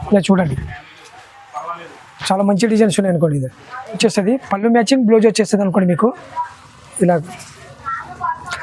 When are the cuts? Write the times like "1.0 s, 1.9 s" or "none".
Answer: 4.0 s